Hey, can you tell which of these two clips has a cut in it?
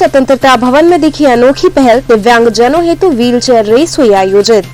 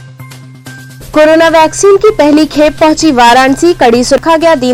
second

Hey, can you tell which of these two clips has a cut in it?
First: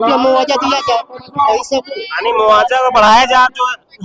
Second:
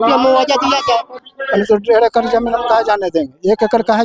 second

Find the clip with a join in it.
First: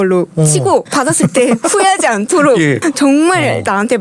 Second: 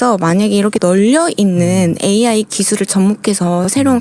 first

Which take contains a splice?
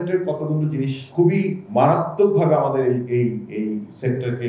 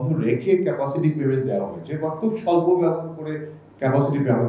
first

